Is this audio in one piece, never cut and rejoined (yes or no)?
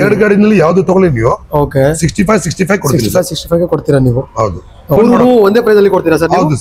no